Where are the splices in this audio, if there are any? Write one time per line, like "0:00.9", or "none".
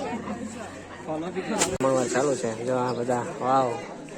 0:01.8

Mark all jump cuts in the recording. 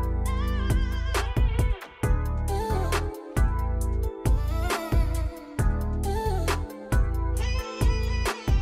0:01.4

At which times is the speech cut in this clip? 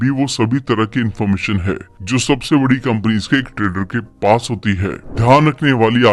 0:05.0

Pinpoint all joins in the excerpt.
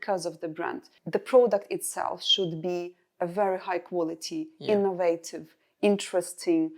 0:01.0

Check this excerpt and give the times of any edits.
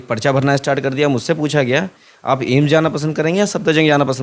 none

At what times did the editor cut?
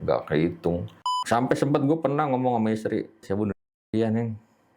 0:01.1

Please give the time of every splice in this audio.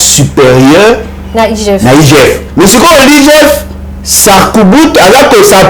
0:02.4

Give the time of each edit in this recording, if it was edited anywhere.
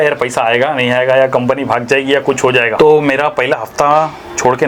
0:02.7

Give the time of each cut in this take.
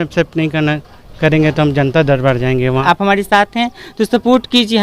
0:02.8

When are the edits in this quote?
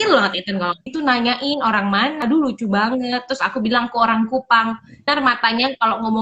0:00.9
0:02.2
0:05.1

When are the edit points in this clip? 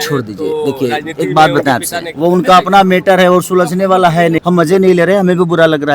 0:02.0
0:04.4

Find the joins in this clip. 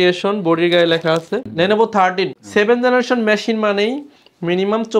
0:01.5
0:02.4

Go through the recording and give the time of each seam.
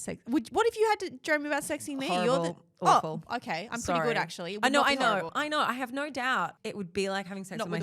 0:05.3
0:06.6

